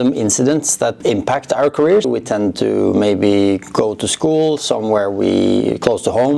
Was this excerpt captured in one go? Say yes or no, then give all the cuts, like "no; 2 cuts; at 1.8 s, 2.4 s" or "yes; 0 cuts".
no; 2 cuts; at 1.0 s, 2.1 s